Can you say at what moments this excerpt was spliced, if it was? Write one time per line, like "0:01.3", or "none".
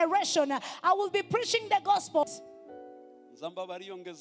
0:02.2